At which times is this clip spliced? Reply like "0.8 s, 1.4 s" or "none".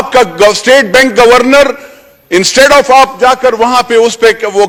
none